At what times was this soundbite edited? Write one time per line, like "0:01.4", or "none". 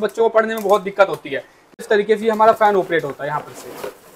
0:01.8